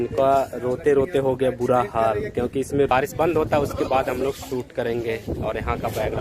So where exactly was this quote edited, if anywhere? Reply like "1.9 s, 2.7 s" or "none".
2.9 s